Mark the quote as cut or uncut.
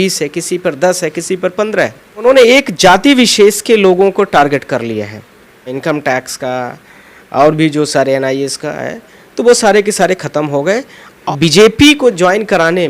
cut